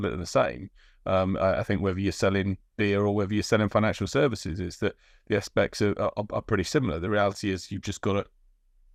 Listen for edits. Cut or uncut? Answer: uncut